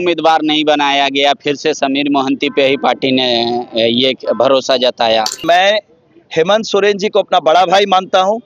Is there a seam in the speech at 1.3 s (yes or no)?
no